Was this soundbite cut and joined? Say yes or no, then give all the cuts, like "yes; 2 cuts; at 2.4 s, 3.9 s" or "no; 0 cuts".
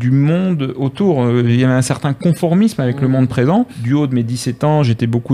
yes; 1 cut; at 3.8 s